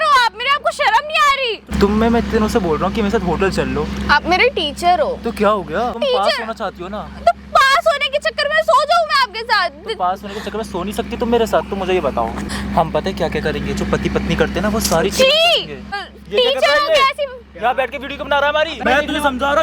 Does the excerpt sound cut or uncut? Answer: cut